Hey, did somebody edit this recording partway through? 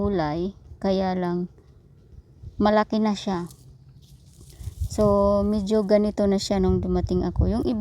yes; 1 cut; at 6.0 s

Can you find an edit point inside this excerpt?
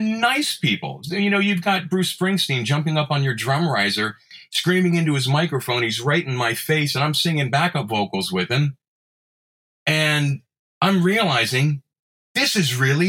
no; 0 cuts

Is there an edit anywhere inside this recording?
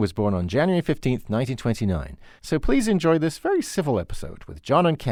no; 0 cuts

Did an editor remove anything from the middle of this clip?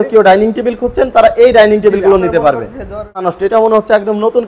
yes; 1 cut; at 3.2 s

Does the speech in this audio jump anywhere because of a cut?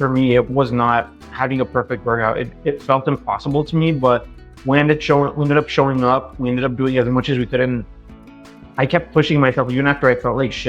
no; 0 cuts

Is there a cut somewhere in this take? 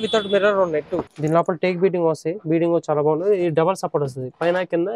yes; 1 cut; at 1.1 s

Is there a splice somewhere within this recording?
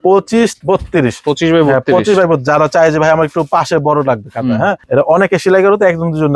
yes; 2 cuts; at 0.9 s, 4.8 s

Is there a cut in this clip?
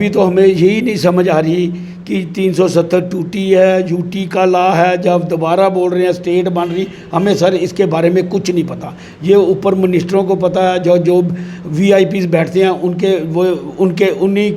no; 0 cuts

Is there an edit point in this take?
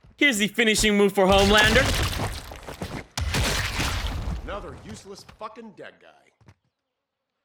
no; 0 cuts

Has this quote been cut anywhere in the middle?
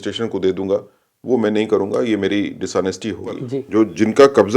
yes; 1 cut; at 3.5 s

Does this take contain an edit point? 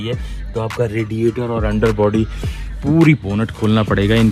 yes; 1 cut; at 3.2 s

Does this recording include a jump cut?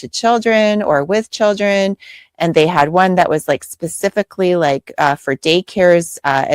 no; 0 cuts

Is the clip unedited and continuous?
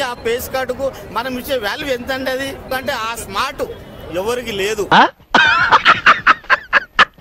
yes; 0 cuts

